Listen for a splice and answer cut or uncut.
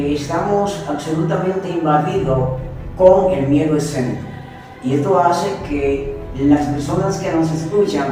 uncut